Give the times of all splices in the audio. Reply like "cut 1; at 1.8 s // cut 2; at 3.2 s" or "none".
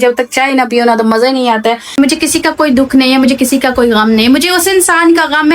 cut 1; at 2.0 s